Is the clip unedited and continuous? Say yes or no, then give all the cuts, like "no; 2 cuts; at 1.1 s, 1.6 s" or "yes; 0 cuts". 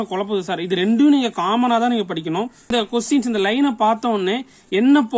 no; 1 cut; at 2.7 s